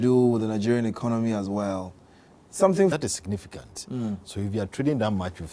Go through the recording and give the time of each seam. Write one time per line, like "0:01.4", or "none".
none